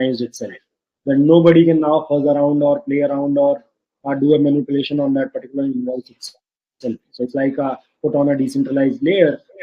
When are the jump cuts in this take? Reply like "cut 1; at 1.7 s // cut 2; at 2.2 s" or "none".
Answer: none